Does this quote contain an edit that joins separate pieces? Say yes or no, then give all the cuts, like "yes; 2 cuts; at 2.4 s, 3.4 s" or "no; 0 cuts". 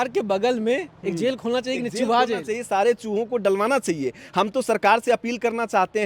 no; 0 cuts